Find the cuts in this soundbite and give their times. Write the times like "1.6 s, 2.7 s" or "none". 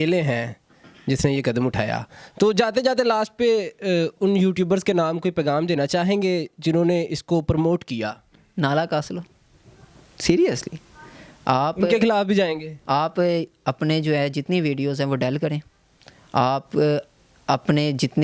none